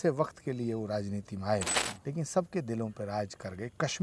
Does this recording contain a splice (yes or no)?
no